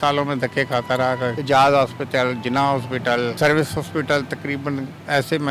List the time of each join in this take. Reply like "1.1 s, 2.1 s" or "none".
1.4 s, 3.3 s